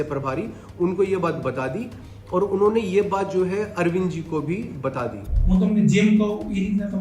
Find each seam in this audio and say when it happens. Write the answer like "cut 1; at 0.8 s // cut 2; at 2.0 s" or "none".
cut 1; at 5.3 s